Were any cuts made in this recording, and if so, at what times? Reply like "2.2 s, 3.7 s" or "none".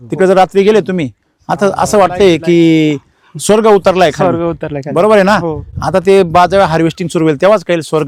none